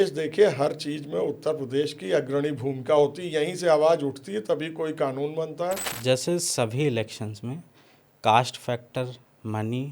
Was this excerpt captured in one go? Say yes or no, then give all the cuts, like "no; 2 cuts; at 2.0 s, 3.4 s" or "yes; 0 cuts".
no; 1 cut; at 5.9 s